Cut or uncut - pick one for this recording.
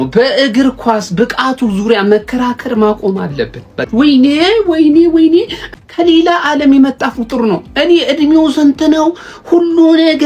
cut